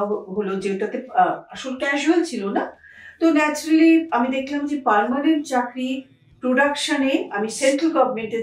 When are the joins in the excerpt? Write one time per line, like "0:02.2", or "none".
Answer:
none